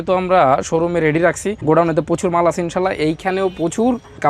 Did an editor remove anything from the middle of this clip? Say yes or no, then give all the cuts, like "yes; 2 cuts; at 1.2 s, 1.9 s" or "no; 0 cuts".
yes; 1 cut; at 1.5 s